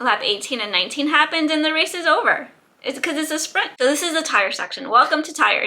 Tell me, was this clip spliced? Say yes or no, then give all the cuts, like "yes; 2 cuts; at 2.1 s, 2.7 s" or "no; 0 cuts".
yes; 1 cut; at 3.7 s